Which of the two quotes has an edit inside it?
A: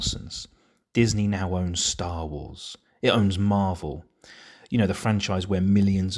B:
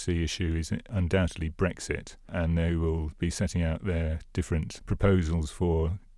B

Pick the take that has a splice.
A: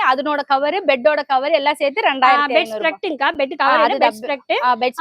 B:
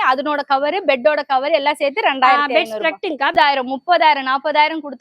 B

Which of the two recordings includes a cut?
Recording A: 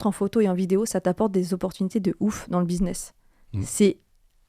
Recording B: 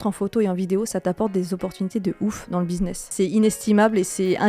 B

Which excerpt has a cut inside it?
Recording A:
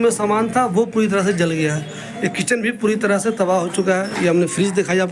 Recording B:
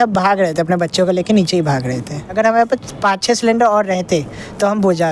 B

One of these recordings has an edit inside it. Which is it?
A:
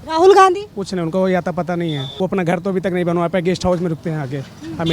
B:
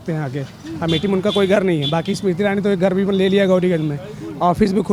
A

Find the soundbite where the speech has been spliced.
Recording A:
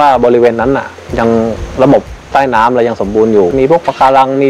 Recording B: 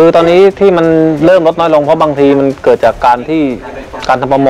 A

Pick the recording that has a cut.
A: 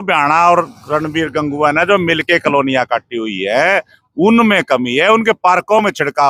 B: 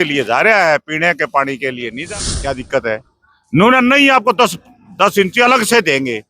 B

